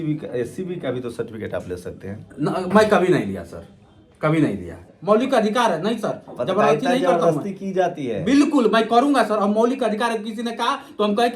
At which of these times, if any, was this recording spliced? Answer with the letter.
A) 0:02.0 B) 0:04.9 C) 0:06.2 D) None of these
B